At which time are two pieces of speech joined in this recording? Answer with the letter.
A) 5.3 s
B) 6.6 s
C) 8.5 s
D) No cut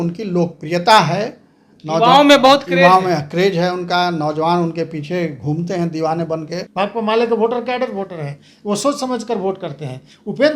B